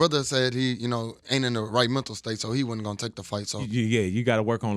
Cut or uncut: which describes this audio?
cut